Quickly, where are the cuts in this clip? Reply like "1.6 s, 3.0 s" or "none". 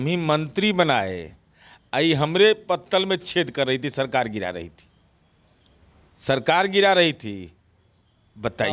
none